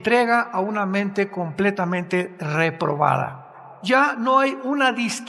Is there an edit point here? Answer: yes; 1 cut; at 3.7 s

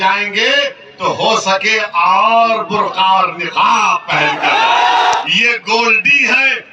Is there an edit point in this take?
yes; 1 cut; at 5.2 s

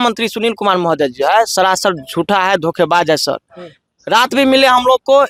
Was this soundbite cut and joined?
no; 0 cuts

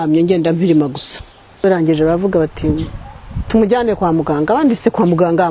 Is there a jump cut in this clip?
yes; 1 cut; at 1.6 s

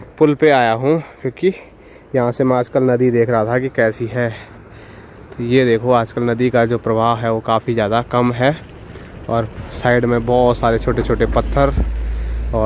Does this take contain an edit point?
no; 0 cuts

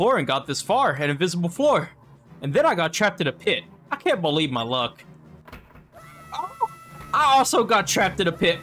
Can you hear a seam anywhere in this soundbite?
no; 0 cuts

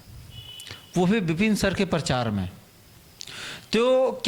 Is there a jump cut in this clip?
no; 0 cuts

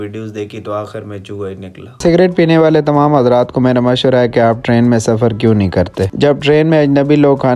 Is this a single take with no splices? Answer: no; 1 cut; at 1.9 s

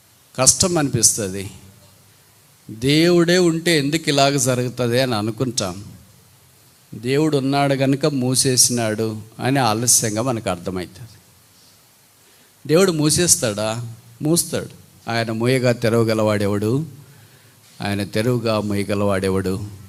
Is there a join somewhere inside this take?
no; 0 cuts

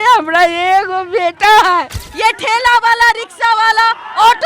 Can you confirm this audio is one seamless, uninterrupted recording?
no; 1 cut; at 2.0 s

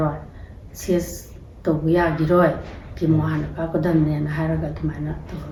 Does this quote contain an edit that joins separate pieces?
no; 0 cuts

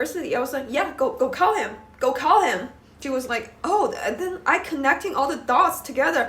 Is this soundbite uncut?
no; 1 cut; at 3.1 s

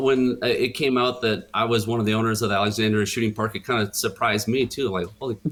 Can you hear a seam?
no; 0 cuts

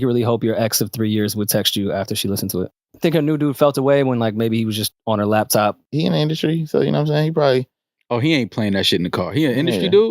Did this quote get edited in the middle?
yes; 2 cuts; at 2.9 s, 5.9 s

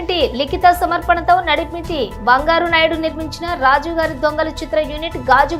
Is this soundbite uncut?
yes; 0 cuts

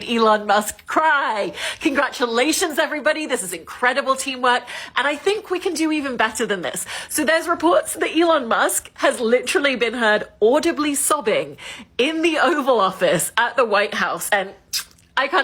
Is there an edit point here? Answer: no; 0 cuts

